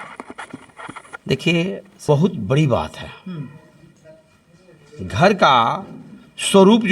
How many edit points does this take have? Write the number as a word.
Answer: one